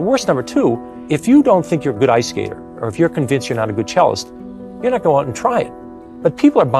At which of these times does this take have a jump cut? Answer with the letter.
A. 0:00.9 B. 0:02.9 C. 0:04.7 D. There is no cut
A